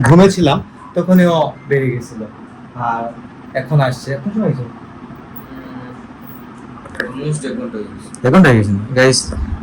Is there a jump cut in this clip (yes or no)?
no